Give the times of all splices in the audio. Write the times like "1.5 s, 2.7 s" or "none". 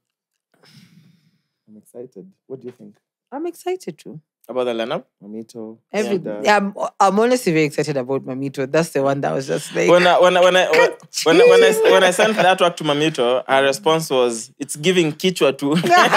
none